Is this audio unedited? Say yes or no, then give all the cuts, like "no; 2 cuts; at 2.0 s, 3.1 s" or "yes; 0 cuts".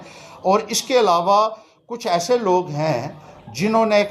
yes; 0 cuts